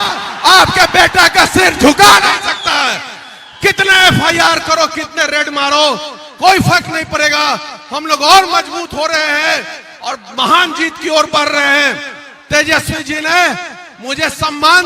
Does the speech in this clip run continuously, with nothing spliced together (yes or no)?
yes